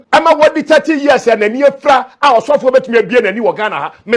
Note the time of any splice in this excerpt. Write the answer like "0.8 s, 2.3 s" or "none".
none

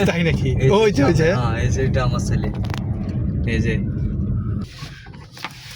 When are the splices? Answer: 4.7 s

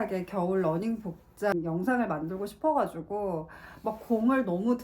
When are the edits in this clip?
1.5 s

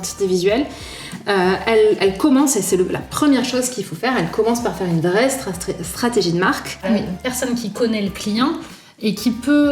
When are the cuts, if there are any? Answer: 6.8 s

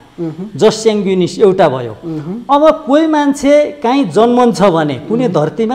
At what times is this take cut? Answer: none

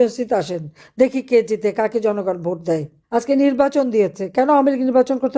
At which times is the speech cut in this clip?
3.0 s

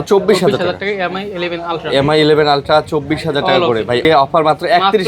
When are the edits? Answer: 4.0 s

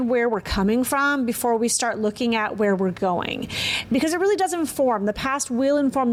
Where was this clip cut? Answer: none

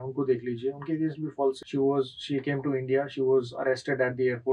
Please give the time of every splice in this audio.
1.6 s

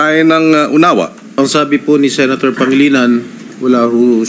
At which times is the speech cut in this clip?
1.3 s

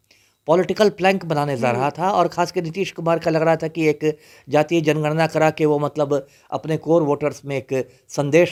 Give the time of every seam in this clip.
none

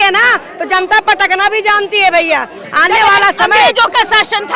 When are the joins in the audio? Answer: none

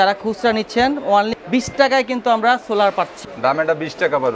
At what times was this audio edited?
1.4 s, 3.2 s

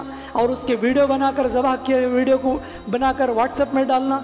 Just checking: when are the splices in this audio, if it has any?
none

